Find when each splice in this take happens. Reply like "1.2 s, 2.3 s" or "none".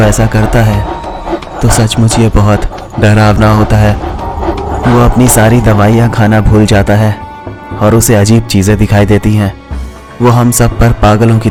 none